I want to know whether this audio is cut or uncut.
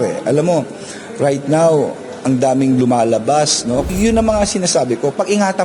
cut